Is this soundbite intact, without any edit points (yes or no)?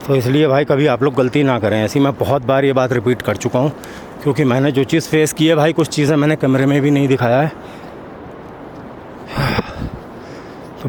yes